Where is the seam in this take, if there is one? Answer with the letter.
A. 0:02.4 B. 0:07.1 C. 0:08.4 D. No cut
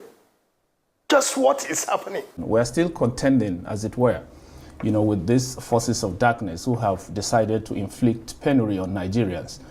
A